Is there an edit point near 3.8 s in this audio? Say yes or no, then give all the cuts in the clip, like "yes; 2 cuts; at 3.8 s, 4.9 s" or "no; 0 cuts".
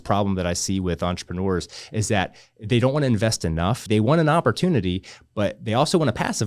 yes; 1 cut; at 3.8 s